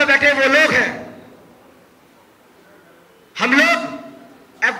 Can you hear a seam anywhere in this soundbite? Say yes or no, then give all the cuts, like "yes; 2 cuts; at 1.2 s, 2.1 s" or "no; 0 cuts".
no; 0 cuts